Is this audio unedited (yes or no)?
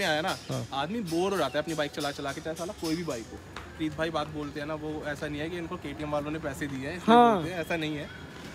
no